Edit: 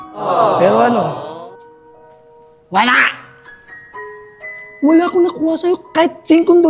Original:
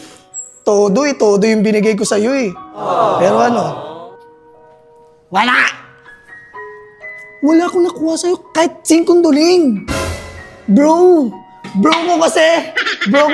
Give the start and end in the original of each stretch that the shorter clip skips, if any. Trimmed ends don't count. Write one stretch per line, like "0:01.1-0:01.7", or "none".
none